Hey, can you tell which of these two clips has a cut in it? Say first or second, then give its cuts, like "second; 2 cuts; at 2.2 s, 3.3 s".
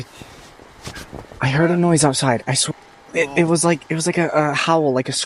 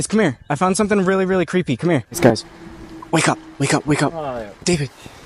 second; 1 cut; at 2.1 s